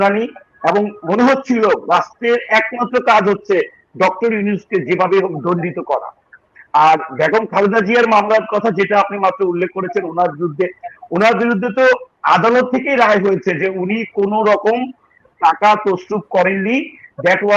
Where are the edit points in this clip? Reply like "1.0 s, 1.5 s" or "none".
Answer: none

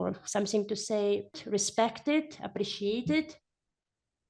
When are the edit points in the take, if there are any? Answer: 1.4 s

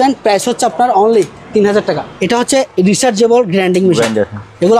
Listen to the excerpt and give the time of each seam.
2.1 s

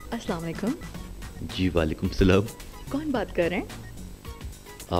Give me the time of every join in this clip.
none

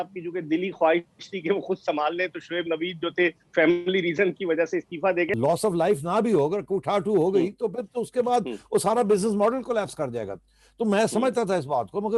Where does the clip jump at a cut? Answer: 5.3 s

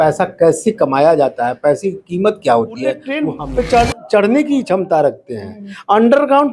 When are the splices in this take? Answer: 3.3 s

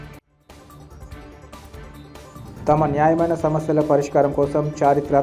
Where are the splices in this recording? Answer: none

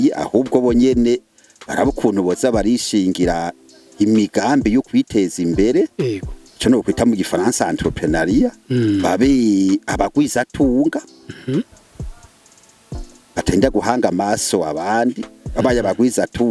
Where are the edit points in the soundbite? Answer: none

